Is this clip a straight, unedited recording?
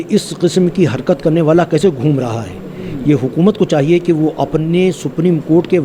yes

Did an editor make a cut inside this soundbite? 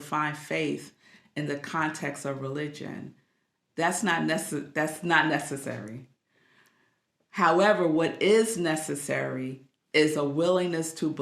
no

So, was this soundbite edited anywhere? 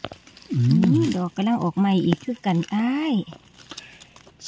no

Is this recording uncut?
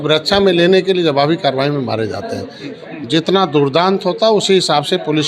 no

